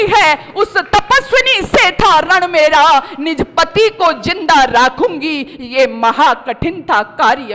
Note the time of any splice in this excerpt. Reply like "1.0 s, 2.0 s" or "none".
none